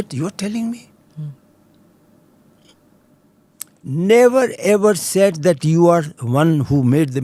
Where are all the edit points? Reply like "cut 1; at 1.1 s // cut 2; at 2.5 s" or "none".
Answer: none

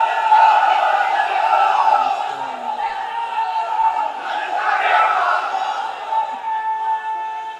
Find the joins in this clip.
none

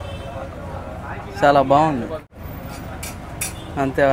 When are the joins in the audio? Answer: cut 1; at 2.3 s

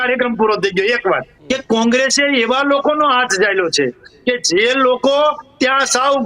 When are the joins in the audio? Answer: cut 1; at 1.3 s

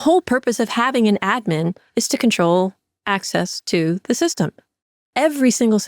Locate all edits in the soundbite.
cut 1; at 5.0 s

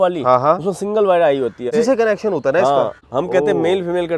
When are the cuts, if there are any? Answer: cut 1; at 1.7 s // cut 2; at 3.0 s

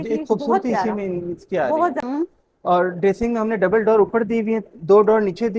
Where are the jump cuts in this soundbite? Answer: cut 1; at 2.0 s

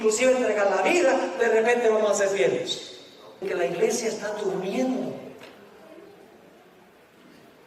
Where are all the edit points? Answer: cut 1; at 3.4 s

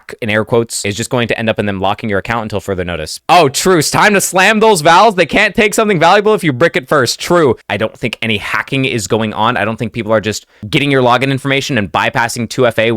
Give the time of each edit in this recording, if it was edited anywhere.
cut 1; at 3.1 s // cut 2; at 7.6 s

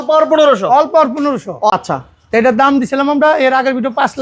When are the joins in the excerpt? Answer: cut 1; at 1.7 s

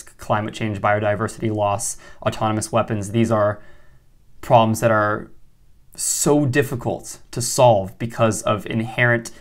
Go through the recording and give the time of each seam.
none

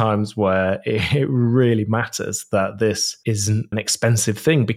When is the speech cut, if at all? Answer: cut 1; at 3.7 s

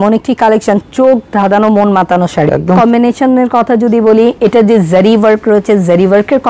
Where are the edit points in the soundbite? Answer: cut 1; at 2.8 s

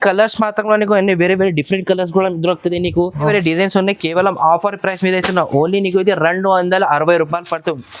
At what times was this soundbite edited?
cut 1; at 3.3 s

